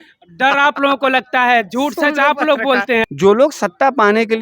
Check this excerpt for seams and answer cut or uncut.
cut